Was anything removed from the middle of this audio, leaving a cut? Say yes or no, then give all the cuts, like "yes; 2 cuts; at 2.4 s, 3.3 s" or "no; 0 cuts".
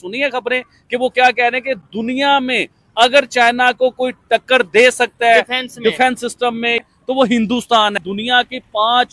yes; 1 cut; at 8.0 s